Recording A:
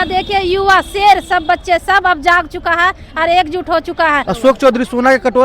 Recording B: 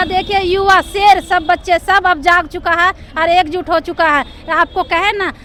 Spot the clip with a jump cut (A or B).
A